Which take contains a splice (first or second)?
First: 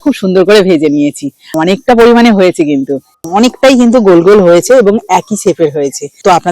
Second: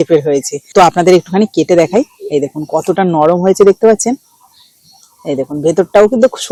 first